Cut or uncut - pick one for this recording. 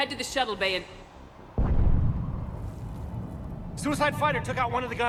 uncut